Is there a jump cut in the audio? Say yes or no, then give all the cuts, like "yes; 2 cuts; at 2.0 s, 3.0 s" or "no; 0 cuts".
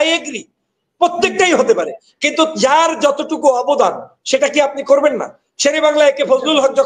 no; 0 cuts